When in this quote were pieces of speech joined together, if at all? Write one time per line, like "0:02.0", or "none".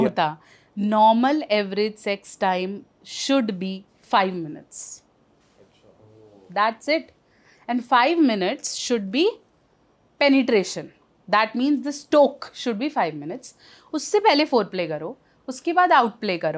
none